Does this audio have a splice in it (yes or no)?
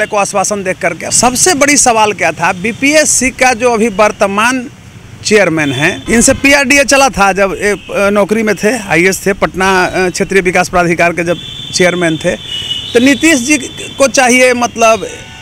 yes